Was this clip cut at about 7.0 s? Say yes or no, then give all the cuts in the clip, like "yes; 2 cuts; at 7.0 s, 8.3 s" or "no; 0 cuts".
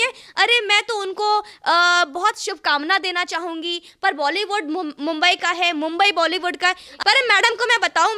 no; 0 cuts